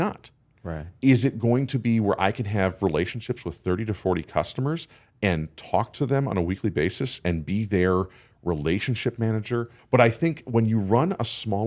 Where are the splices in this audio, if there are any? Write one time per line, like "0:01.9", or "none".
0:09.7